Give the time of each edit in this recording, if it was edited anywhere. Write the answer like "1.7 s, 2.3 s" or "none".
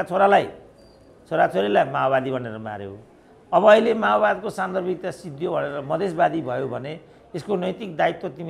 none